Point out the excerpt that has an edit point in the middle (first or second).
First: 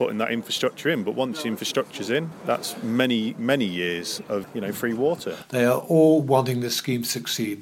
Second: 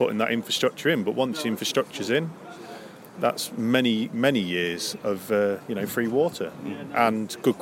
first